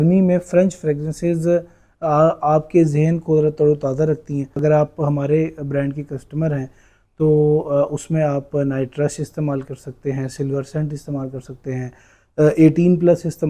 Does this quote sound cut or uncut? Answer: cut